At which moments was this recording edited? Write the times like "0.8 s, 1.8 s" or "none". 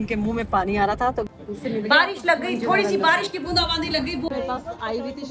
1.3 s, 4.3 s

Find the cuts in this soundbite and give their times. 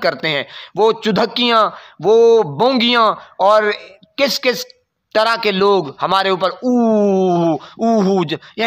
none

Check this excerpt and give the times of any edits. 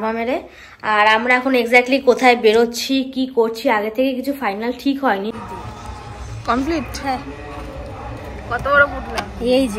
5.4 s

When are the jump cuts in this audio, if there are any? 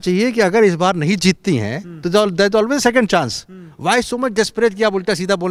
none

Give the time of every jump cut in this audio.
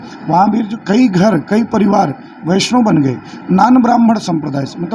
none

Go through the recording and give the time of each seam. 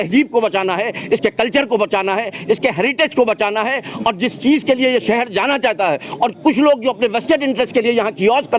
none

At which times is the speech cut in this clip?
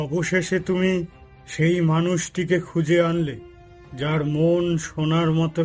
none

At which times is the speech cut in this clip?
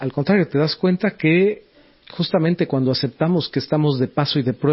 1.7 s

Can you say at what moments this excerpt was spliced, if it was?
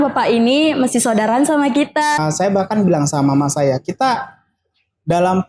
2.2 s

